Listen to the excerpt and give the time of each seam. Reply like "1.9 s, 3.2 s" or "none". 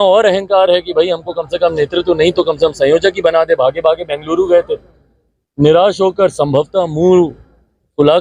none